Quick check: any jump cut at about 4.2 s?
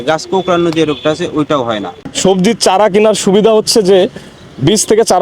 no; 1 cut; at 2.1 s

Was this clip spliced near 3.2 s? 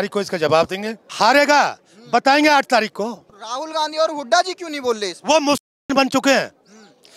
yes; 2 cuts; at 1.0 s, 3.2 s

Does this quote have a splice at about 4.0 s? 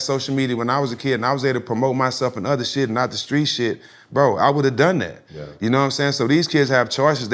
no; 0 cuts

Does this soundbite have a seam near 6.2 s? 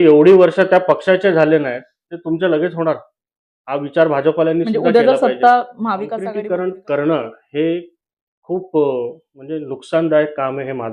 yes; 1 cut; at 6.2 s

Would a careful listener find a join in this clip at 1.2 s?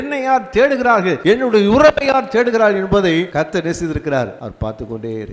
yes; 3 cuts; at 1.2 s, 3.3 s, 4.4 s

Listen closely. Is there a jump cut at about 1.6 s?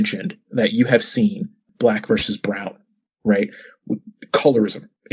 yes; 1 cut; at 1.6 s

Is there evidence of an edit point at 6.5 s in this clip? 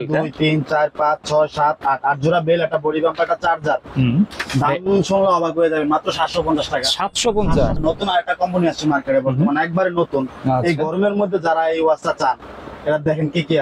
no; 2 cuts; at 4.4 s, 7.8 s

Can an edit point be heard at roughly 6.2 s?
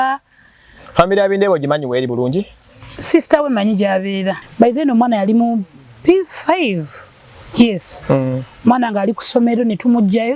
no; 1 cut; at 4.4 s

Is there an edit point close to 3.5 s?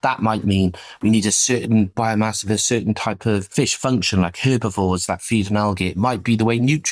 yes; 1 cut; at 3.5 s

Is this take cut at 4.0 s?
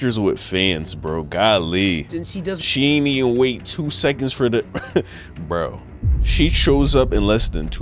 no; 0 cuts

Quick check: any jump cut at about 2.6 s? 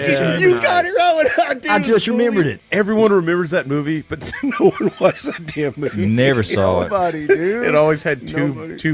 yes; 1 cut; at 2.6 s

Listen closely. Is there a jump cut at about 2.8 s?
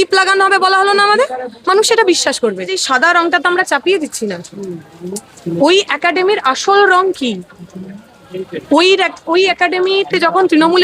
yes; 1 cut; at 2.8 s

